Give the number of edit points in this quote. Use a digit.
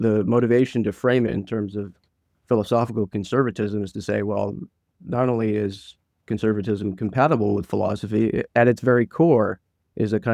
0